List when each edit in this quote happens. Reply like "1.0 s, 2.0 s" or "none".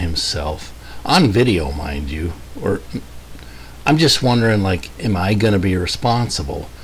none